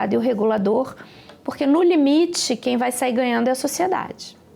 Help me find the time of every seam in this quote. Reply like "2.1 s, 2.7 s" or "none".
none